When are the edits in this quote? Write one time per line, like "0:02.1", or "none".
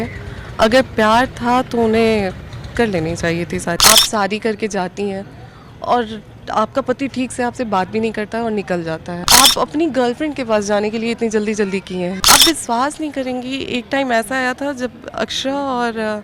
0:03.8
0:09.2
0:12.2